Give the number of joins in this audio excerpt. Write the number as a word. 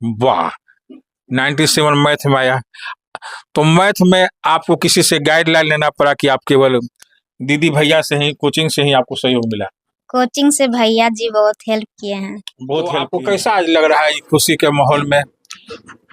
one